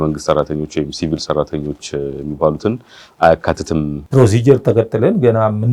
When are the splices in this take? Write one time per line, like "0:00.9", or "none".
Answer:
0:04.0